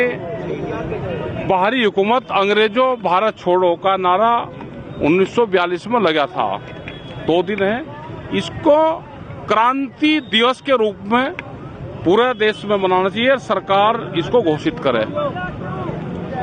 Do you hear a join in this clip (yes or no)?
no